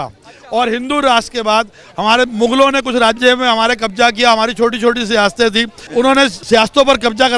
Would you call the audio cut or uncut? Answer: cut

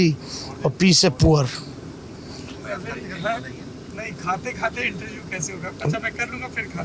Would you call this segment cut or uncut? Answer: uncut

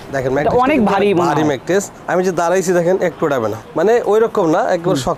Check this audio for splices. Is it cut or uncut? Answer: uncut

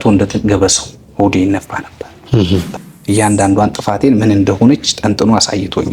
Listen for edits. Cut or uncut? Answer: cut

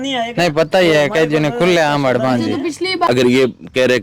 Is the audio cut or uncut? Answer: cut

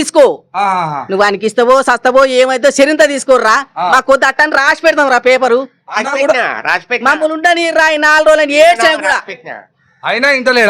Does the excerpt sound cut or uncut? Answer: uncut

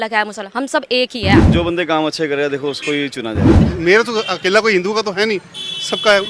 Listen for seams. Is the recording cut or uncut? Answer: cut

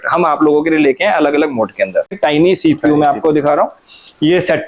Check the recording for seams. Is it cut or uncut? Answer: cut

